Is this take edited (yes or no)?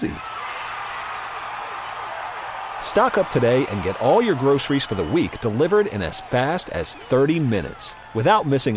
no